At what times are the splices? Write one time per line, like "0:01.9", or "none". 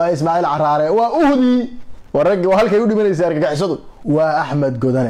0:03.9